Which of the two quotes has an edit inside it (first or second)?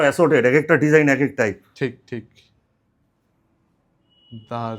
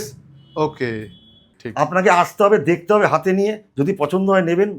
second